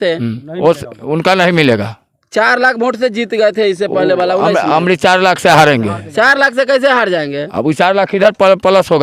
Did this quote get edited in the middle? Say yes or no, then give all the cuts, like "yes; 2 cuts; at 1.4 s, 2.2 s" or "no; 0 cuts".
no; 0 cuts